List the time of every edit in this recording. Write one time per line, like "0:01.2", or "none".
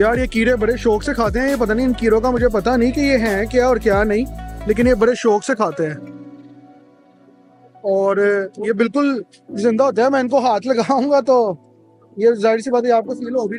none

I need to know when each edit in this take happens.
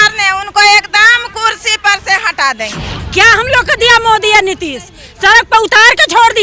0:03.0

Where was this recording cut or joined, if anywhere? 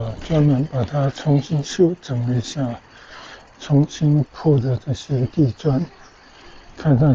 none

